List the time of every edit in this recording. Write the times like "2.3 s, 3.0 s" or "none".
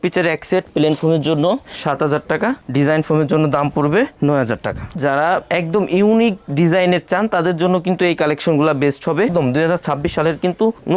4.9 s, 9.3 s